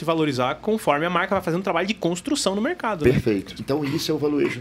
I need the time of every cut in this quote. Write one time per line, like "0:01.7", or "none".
0:03.6